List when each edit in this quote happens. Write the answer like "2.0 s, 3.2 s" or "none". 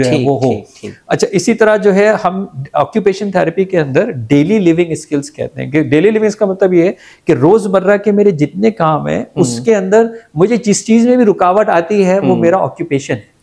none